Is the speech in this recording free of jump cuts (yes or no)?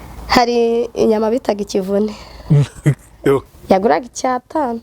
no